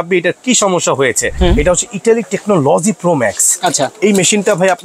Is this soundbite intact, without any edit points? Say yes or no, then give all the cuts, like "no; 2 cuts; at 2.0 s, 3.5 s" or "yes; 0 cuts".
no; 1 cut; at 1.3 s